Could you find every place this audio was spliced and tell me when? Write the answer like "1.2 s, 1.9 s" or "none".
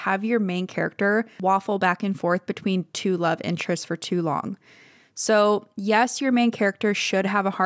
none